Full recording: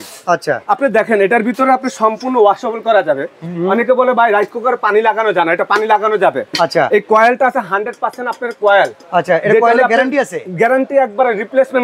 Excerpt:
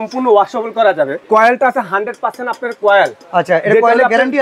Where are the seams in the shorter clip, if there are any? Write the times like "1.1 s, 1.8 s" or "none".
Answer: 1.2 s

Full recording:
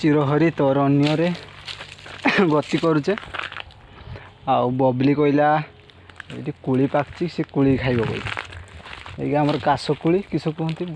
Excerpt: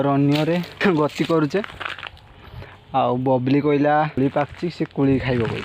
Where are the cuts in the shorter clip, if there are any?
0.8 s, 4.2 s

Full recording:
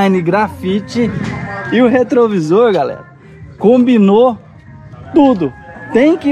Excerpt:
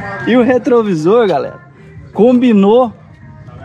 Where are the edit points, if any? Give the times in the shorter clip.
none

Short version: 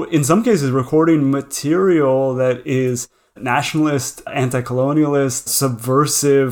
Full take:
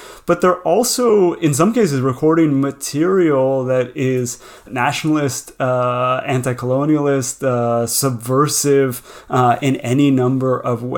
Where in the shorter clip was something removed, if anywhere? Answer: 4.2 s, 5.5 s

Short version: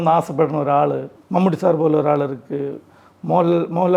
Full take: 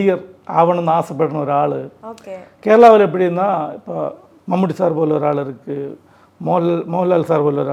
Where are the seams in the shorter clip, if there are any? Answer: 1.1 s

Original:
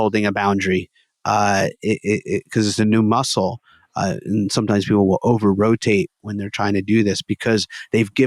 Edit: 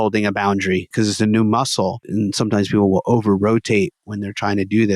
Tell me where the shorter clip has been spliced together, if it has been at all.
0.9 s, 2.0 s

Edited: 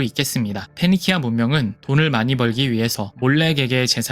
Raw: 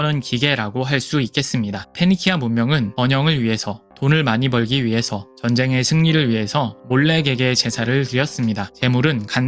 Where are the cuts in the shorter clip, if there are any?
1.7 s, 3.1 s

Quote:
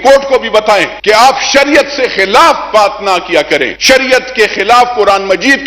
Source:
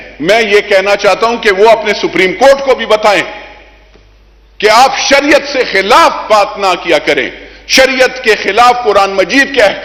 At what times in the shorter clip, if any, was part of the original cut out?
0.9 s, 3.7 s

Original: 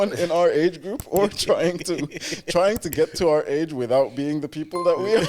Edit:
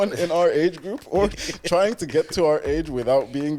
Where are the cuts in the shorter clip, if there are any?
1.4 s

